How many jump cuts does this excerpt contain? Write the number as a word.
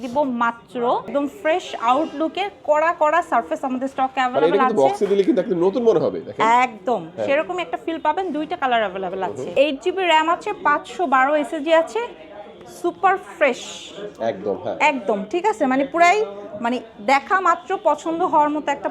two